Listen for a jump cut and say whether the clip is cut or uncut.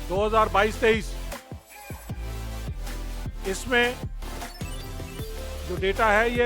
cut